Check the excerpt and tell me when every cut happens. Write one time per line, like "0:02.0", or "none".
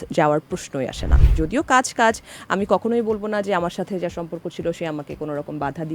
0:01.3